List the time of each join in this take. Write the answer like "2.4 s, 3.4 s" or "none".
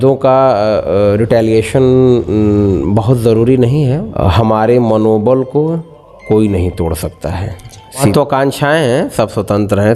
4.1 s, 8.1 s